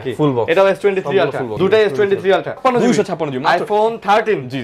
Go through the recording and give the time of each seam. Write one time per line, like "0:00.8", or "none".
0:01.4
0:02.6